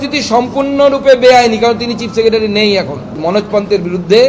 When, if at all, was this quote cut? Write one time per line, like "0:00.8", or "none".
0:03.1